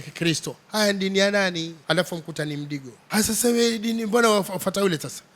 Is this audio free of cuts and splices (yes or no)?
no